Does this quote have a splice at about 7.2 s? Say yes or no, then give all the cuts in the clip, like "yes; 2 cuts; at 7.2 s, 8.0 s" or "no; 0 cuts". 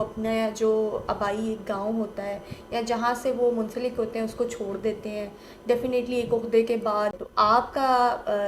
yes; 1 cut; at 7.2 s